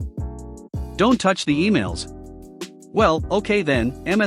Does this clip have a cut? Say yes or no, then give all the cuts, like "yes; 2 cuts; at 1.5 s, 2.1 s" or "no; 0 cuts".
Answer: yes; 1 cut; at 0.9 s